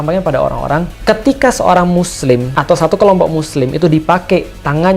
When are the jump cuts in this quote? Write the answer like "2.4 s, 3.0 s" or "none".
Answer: 0.9 s, 2.5 s